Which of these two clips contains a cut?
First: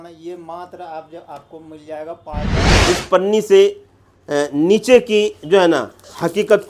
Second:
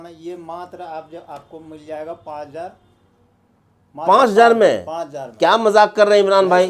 first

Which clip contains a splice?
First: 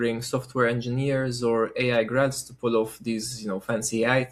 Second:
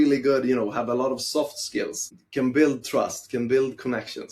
second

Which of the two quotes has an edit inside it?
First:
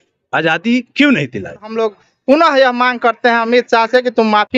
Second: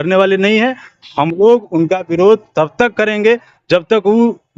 first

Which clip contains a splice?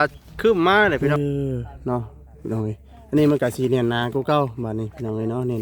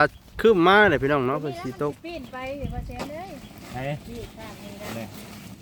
first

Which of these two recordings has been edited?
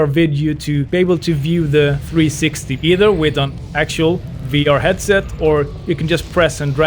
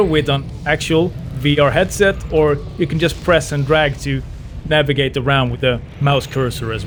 first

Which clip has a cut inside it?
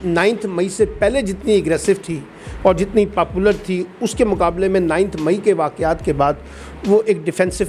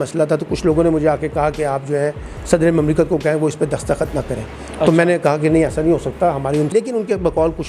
second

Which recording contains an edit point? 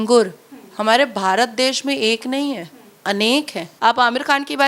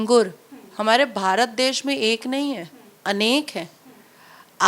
first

